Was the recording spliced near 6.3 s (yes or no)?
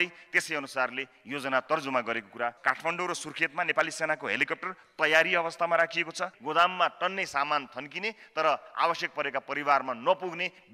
yes